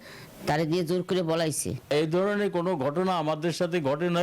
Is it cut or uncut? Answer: cut